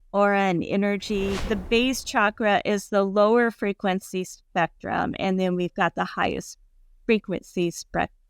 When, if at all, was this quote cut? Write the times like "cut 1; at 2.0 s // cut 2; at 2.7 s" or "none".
cut 1; at 1.4 s

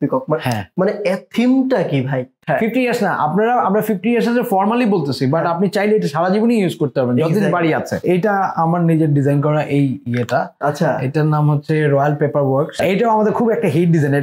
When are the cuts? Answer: cut 1; at 2.4 s // cut 2; at 8.0 s // cut 3; at 12.8 s

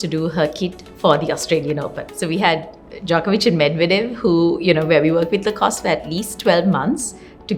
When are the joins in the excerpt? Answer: none

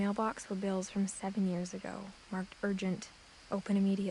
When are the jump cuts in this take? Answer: none

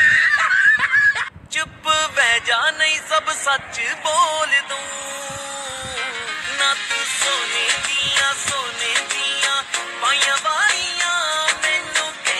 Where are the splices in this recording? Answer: cut 1; at 1.3 s

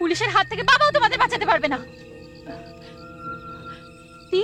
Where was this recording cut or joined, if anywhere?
none

